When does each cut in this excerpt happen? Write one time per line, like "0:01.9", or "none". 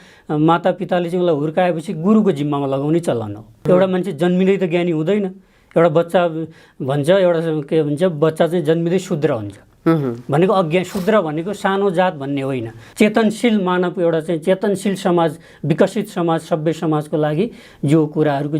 0:03.6
0:12.8